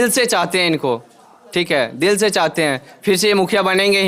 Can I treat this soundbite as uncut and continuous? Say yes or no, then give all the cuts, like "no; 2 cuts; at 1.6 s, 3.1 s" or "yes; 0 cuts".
yes; 0 cuts